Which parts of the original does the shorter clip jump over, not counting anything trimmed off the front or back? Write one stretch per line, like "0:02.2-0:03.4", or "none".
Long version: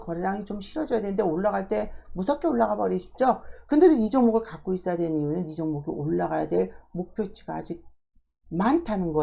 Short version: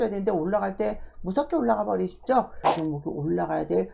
0:03.6-0:05.5

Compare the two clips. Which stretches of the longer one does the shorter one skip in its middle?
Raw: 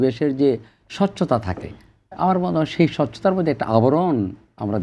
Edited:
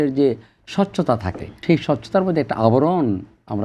0:01.8-0:02.7

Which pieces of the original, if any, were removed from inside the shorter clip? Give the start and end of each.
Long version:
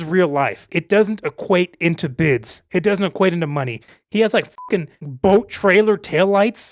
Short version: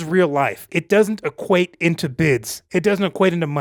none

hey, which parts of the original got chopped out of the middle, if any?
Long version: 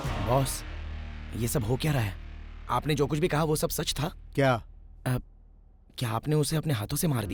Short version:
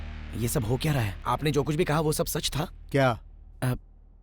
0:02.1-0:02.6

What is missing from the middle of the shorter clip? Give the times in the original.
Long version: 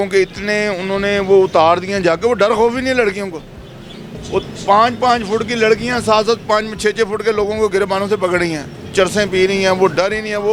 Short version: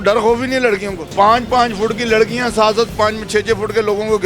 0:03.4-0:04.5

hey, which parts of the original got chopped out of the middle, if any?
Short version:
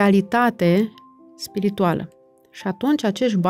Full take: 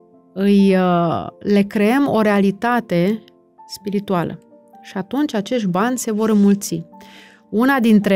none

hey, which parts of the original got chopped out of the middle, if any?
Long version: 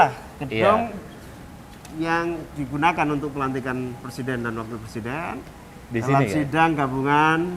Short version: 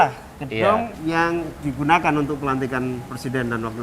0:00.9-0:01.9

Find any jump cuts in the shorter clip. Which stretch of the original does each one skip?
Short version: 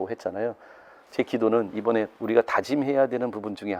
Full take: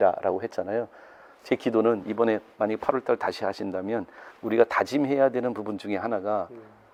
0:02.5-0:04.4

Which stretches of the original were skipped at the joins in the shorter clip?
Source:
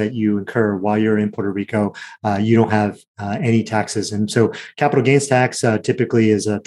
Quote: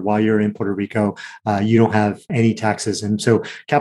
0:03.0-0:03.3

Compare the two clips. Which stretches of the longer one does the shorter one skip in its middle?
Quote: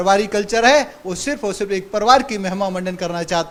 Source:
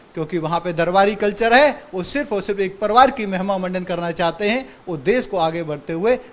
none

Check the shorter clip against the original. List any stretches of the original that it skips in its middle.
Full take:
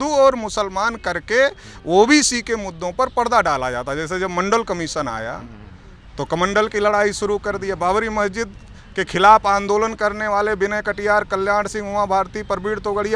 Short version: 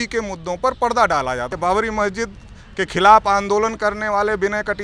0:03.9-0:07.7

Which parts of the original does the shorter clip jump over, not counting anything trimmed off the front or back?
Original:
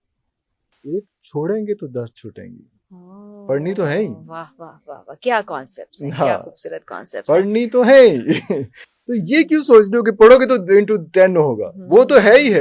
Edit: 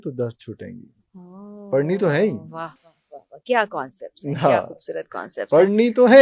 none

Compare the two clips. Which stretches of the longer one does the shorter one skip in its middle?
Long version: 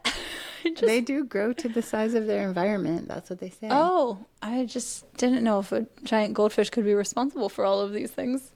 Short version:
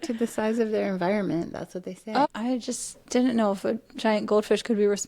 0:03.8-0:04.3

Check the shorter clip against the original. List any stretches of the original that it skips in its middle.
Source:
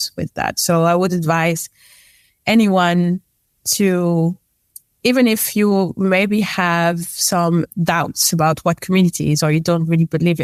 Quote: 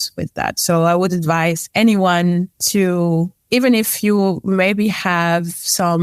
0:01.6-0:02.4
0:03.3-0:03.6
0:04.4-0:04.9

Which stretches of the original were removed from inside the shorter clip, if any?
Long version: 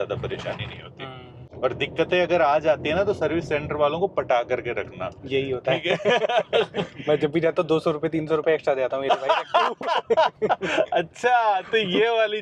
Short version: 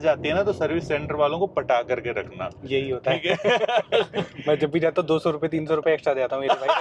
none

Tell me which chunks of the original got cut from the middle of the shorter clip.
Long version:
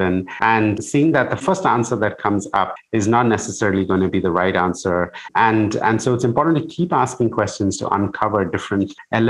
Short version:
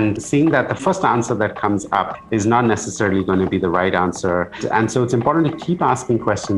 0:05.2-0:05.7

